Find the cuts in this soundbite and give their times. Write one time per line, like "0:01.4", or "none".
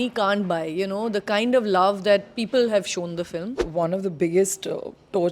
0:03.6